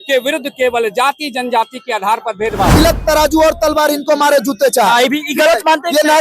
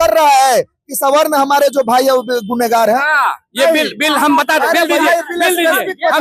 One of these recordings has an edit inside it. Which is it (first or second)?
first